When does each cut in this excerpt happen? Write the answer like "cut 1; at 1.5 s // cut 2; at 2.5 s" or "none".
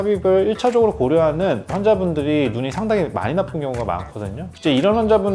cut 1; at 4.4 s